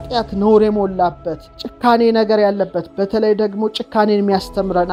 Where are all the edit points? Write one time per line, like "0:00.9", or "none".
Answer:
none